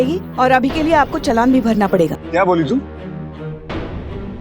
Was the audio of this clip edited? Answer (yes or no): yes